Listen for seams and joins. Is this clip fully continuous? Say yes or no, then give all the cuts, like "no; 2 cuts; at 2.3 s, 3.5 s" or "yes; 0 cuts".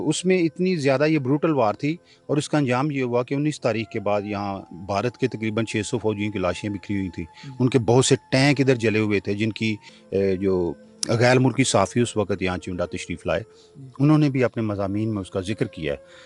yes; 0 cuts